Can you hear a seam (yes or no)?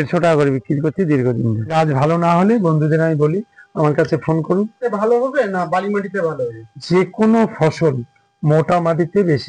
yes